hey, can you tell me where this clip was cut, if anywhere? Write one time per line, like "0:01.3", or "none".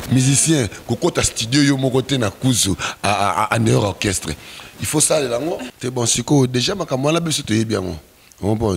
0:05.7